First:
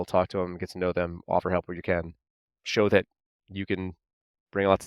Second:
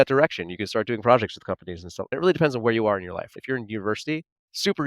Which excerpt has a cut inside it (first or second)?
second